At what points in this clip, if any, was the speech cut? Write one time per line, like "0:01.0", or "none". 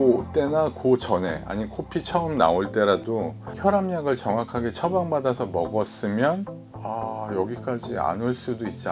0:03.4
0:06.7